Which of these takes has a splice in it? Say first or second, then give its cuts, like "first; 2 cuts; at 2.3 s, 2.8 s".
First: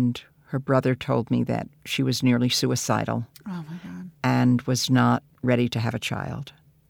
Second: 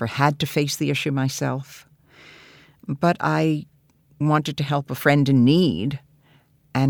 second; 1 cut; at 4.9 s